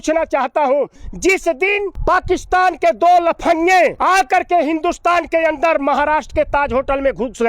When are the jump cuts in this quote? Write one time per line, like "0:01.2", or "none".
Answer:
0:01.0
0:02.0
0:04.0